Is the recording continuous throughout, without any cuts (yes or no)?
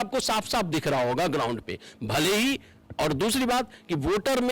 yes